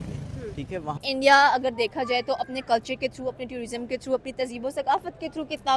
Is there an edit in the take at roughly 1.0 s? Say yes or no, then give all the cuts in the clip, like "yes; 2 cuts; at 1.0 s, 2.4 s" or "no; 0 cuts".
yes; 1 cut; at 1.0 s